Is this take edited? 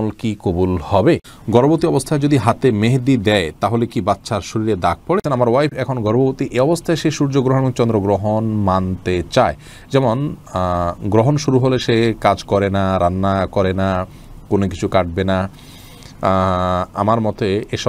yes; 2 cuts; at 1.3 s, 5.2 s

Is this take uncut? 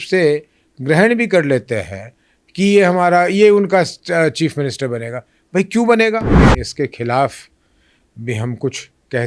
no; 1 cut; at 6.5 s

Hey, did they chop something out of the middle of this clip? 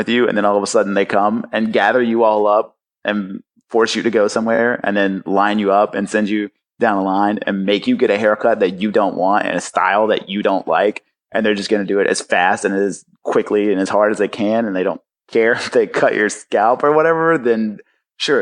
no; 0 cuts

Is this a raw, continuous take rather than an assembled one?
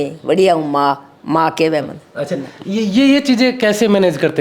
yes; 0 cuts

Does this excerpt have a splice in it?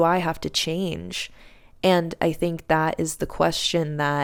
no; 0 cuts

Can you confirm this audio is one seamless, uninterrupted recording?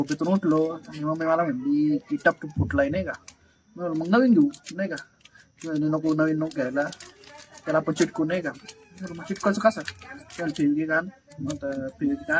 yes; 0 cuts

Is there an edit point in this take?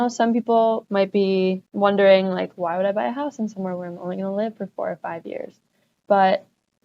yes; 2 cuts; at 0.8 s, 1.7 s

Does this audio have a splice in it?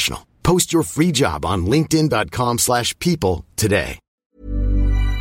yes; 1 cut; at 4.1 s

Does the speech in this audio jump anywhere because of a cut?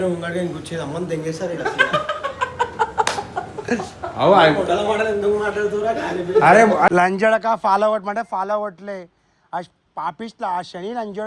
yes; 1 cut; at 6.9 s

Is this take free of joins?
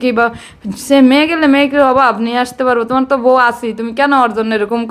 yes; 0 cuts

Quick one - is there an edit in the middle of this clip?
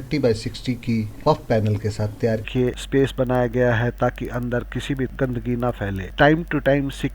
yes; 2 cuts; at 2.5 s, 5.1 s

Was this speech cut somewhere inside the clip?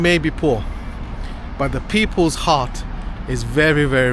no; 0 cuts

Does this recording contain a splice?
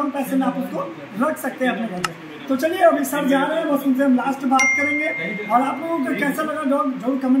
no; 0 cuts

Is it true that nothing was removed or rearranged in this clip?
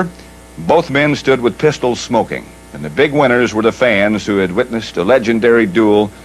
no; 1 cut; at 3.0 s

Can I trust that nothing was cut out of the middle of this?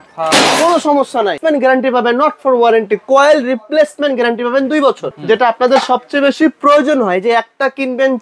no; 2 cuts; at 1.4 s, 5.1 s

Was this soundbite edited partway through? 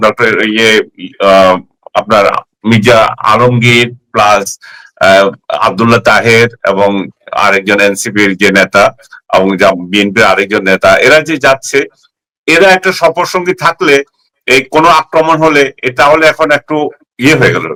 no; 0 cuts

